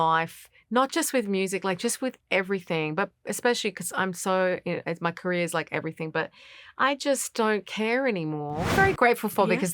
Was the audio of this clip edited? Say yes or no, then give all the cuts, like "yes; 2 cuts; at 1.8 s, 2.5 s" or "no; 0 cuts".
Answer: yes; 1 cut; at 8.7 s